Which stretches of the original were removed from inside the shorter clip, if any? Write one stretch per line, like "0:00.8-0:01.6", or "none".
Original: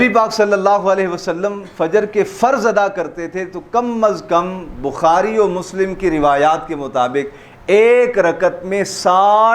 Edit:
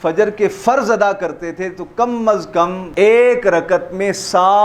0:04.6-0:07.5